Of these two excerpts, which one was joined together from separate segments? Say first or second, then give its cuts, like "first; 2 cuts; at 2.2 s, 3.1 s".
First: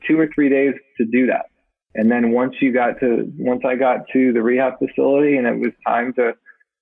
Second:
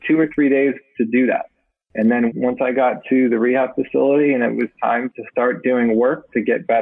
second; 2 cuts; at 2.3 s, 5.1 s